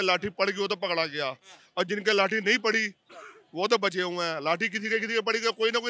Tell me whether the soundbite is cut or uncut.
uncut